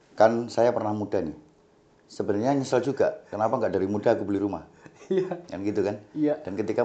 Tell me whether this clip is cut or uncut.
uncut